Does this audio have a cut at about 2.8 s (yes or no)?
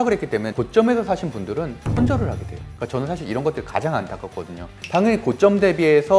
no